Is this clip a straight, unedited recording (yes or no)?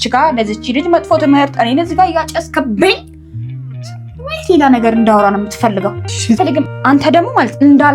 no